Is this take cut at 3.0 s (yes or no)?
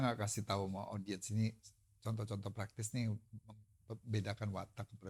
no